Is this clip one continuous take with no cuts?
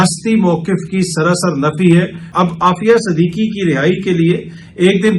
no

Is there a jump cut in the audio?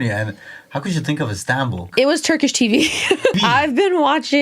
yes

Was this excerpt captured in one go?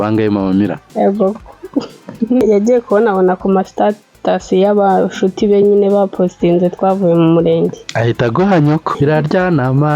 no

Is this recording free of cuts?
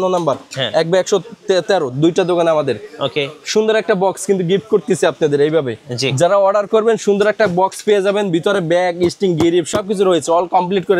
yes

